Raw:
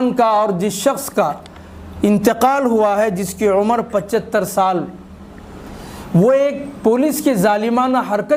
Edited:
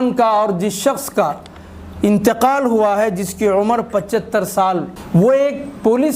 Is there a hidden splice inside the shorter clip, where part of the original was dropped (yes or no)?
yes